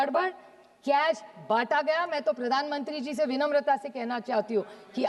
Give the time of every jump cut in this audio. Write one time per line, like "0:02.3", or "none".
none

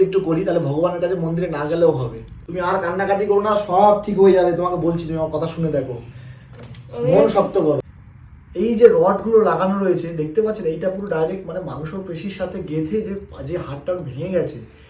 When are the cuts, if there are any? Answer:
none

